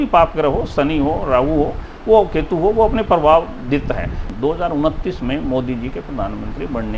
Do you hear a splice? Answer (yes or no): yes